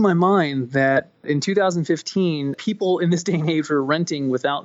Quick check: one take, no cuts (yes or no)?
no